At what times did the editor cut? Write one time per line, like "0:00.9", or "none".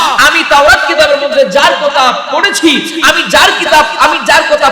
none

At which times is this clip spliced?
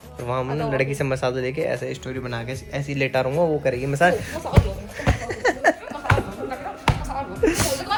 none

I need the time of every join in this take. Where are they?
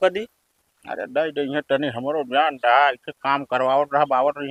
none

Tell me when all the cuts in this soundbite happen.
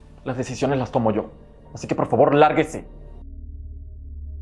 0:03.2

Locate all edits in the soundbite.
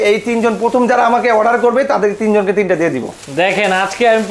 none

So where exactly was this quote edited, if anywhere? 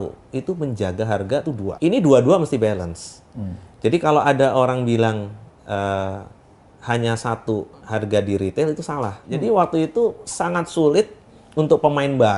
0:01.7
0:09.2

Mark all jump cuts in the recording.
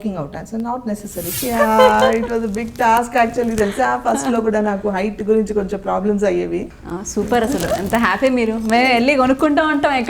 0:01.4
0:06.7

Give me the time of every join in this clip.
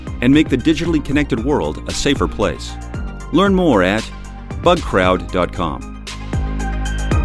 0:06.0

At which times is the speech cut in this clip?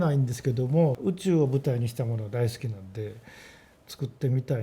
0:01.0

